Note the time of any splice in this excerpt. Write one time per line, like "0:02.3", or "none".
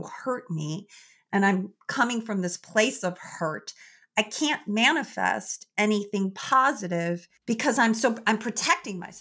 0:07.3

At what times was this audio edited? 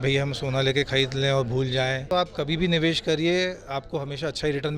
0:02.0

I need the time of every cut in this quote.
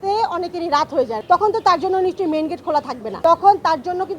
0:01.1
0:03.0

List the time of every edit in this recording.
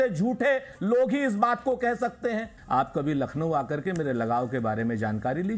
0:02.6

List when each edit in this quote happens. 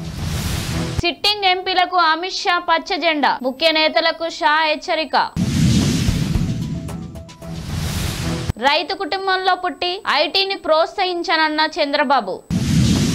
0:00.9

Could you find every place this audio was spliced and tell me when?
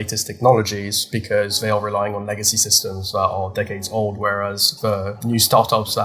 none

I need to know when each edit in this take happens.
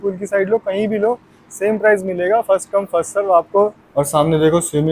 0:03.8

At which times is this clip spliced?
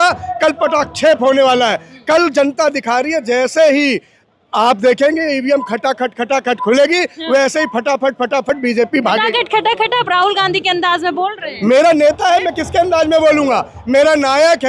none

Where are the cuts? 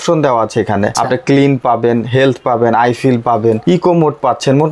0:01.0
0:03.6

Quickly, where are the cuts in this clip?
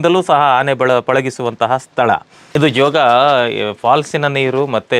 0:02.5

